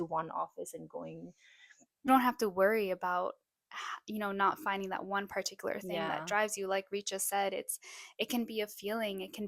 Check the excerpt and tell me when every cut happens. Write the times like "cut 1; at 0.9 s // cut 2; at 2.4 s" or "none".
cut 1; at 2.1 s

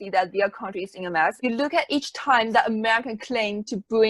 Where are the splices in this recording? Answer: cut 1; at 1.4 s

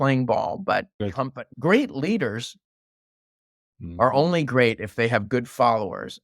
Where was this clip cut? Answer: cut 1; at 1.0 s

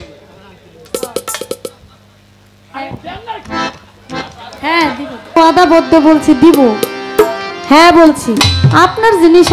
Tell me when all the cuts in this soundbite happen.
cut 1; at 5.4 s // cut 2; at 8.5 s

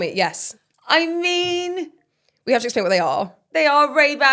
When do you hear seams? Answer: none

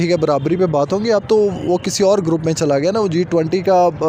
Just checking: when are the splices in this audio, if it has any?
none

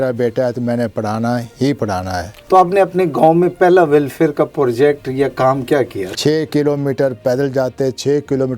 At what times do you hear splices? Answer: cut 1; at 2.3 s // cut 2; at 6.0 s

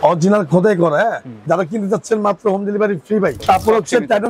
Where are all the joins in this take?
cut 1; at 1.3 s // cut 2; at 3.4 s

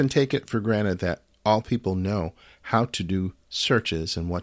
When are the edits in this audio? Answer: cut 1; at 1.3 s

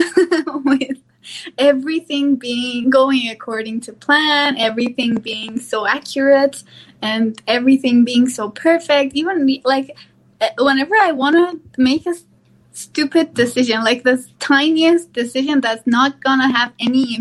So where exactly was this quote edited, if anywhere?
none

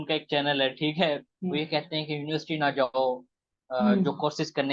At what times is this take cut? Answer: cut 1; at 1.3 s

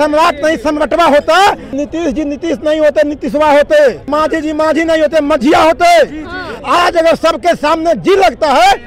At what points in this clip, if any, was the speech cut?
cut 1; at 1.8 s // cut 2; at 4.1 s // cut 3; at 6.4 s

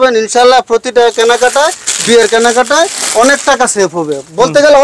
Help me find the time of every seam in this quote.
none

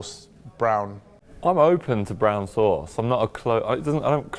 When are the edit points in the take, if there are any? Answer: cut 1; at 1.2 s

